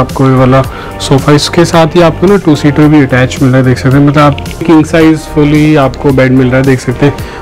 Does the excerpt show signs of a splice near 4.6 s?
yes; 1 cut; at 4.6 s

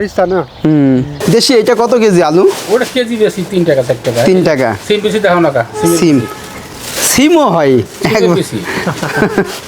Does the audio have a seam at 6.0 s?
no; 1 cut; at 1.1 s

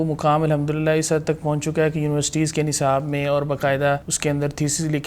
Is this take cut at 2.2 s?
no; 1 cut; at 4.1 s

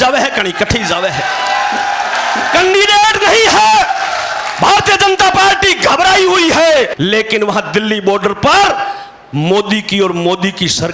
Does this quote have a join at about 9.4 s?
no; 1 cut; at 6.9 s

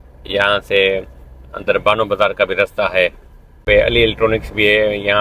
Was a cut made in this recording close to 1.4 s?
no; 1 cut; at 3.6 s

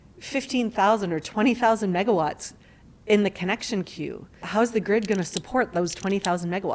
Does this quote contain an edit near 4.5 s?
yes; 1 cut; at 4.5 s

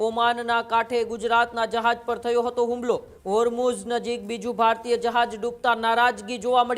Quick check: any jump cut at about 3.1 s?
yes; 1 cut; at 3.1 s

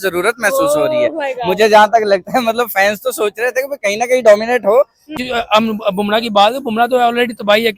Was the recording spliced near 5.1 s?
yes; 1 cut; at 5.1 s

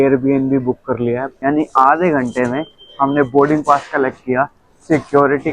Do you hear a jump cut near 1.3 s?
yes; 1 cut; at 1.3 s

